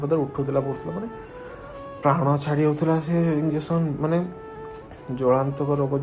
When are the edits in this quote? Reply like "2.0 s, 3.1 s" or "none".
none